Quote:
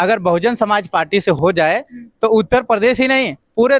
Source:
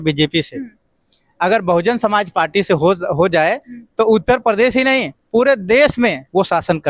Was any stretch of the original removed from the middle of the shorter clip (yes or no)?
yes